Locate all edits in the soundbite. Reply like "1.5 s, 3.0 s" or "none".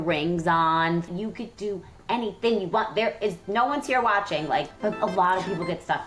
1.1 s, 4.7 s